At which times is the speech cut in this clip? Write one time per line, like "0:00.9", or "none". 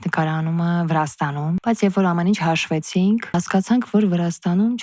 0:01.6
0:03.3